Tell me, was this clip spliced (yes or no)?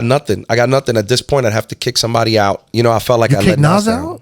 yes